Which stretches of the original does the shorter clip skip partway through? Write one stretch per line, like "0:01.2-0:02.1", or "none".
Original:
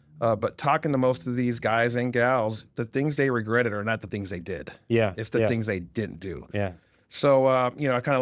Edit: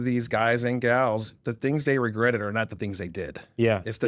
none